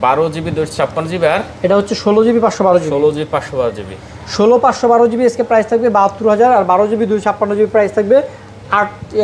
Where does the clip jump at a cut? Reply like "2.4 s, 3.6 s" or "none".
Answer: none